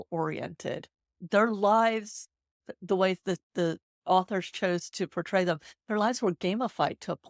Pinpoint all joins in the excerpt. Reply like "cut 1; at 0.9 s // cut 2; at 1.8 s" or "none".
none